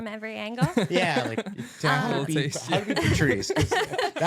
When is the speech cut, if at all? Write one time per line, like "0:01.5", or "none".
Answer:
none

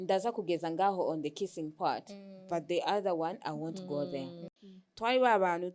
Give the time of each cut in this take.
0:04.5

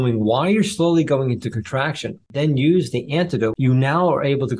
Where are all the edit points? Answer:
0:02.2
0:03.5

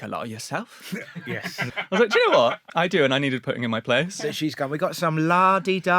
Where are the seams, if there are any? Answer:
0:01.7
0:02.6
0:04.4

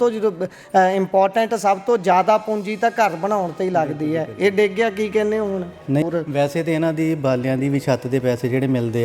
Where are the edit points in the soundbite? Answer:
0:06.0

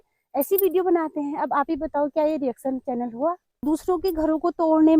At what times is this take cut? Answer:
0:03.6

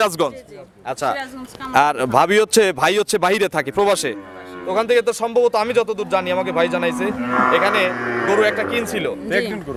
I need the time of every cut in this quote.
none

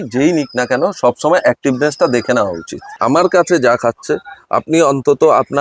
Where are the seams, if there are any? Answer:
0:02.8

